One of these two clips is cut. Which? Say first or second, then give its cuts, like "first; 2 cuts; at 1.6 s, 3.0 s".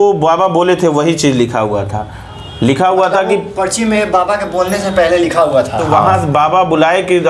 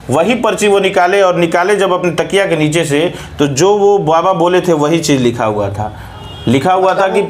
first; 1 cut; at 6.1 s